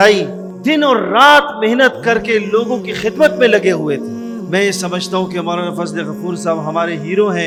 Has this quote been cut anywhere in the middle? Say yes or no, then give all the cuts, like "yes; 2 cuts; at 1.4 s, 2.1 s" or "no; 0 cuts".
no; 0 cuts